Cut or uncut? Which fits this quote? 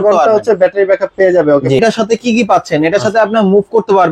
cut